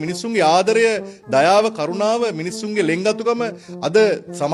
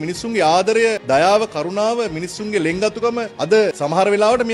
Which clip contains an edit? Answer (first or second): second